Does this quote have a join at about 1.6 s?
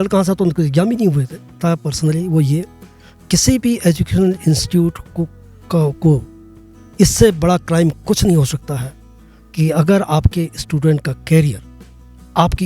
yes; 1 cut; at 1.6 s

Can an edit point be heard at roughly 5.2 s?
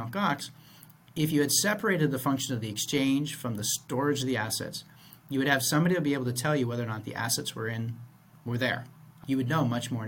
no; 1 cut; at 9.2 s

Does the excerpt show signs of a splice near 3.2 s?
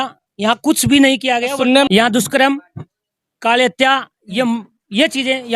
no; 1 cut; at 1.9 s

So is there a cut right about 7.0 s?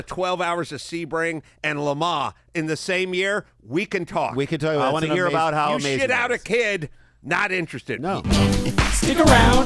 no; 1 cut; at 8.2 s

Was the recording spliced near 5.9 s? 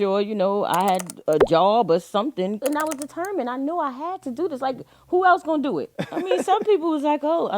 yes; 2 cuts; at 2.6 s, 5.9 s

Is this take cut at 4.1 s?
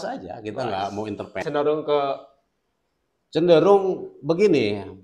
no; 1 cut; at 1.4 s

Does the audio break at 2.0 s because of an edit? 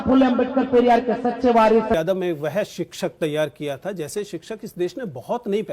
yes; 1 cut; at 2.0 s

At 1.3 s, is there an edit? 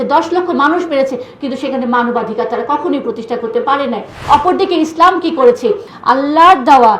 no; 2 cuts; at 4.1 s, 5.9 s

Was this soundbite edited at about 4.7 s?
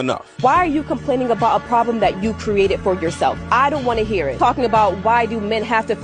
yes; 1 cut; at 4.7 s

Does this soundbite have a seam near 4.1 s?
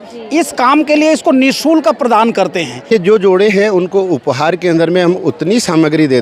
no; 1 cut; at 2.9 s

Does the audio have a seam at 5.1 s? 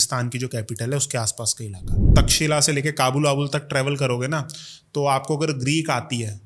no; 1 cut; at 2.1 s

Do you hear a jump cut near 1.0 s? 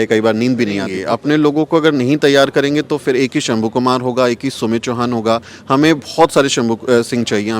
yes; 1 cut; at 1.0 s

